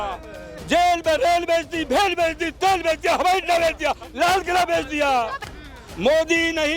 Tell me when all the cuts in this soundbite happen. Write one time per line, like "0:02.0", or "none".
0:05.4